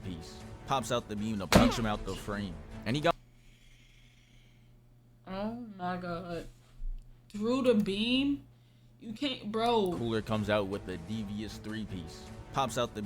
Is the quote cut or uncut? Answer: cut